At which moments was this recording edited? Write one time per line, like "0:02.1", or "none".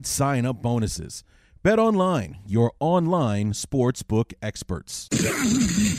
0:05.1